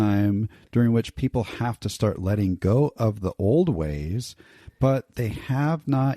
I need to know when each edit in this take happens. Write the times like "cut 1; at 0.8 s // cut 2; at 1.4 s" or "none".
cut 1; at 1.9 s